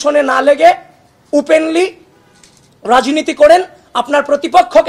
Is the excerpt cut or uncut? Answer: uncut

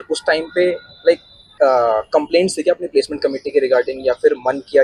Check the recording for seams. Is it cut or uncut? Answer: uncut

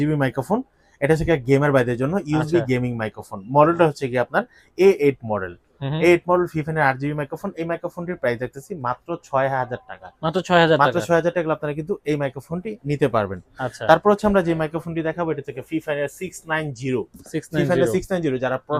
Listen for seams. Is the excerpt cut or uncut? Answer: uncut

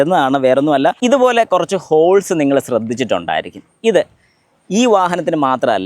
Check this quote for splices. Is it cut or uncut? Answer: cut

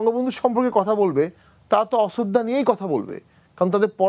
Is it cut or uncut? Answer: uncut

